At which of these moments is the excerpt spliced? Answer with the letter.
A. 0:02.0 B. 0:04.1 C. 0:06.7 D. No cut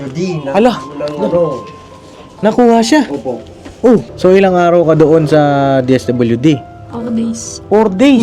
B